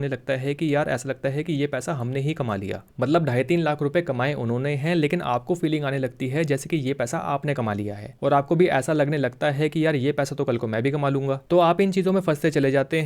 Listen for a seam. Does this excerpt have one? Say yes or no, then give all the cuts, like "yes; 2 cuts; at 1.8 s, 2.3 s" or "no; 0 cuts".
no; 0 cuts